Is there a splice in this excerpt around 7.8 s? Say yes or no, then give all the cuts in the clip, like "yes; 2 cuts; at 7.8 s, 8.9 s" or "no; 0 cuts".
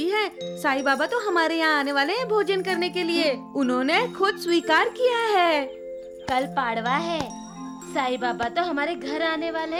no; 0 cuts